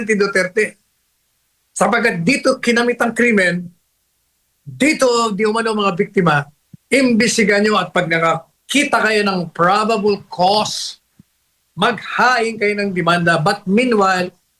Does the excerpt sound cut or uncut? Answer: uncut